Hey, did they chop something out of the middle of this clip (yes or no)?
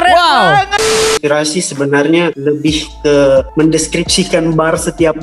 yes